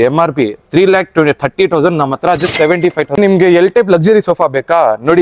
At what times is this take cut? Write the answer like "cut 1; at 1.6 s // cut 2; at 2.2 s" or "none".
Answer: cut 1; at 3.2 s